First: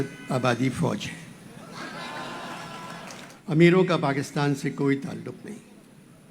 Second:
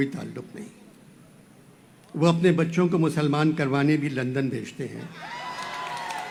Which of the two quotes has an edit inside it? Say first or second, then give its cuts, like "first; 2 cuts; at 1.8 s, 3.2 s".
first; 1 cut; at 3.3 s